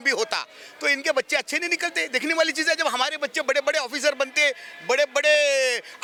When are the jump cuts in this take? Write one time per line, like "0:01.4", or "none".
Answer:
none